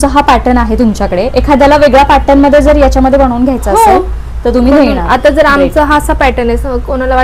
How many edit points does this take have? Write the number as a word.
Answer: zero